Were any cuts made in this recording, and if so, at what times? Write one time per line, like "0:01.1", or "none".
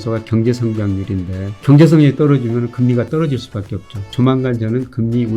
0:01.6
0:04.1